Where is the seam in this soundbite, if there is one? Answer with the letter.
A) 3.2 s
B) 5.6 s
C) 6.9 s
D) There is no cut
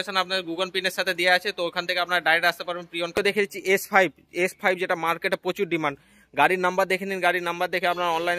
A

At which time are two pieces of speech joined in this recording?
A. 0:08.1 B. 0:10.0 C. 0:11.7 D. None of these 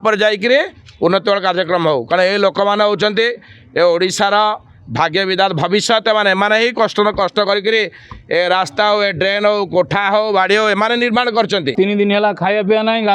C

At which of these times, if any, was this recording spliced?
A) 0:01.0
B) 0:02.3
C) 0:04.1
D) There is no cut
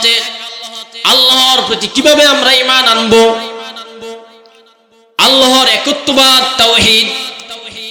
D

